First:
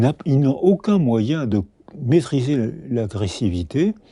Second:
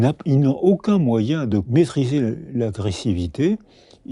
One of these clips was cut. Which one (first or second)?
second